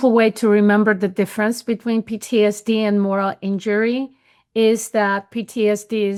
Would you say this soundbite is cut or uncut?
uncut